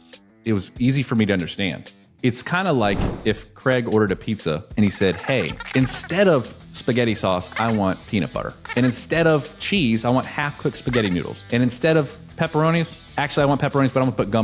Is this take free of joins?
no; 1 cut; at 2.0 s

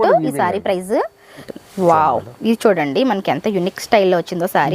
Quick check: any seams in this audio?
yes; 1 cut; at 1.5 s

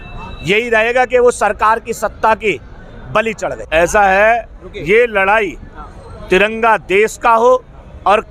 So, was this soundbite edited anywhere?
yes; 1 cut; at 3.6 s

